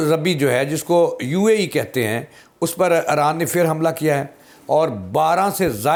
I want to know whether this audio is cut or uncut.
uncut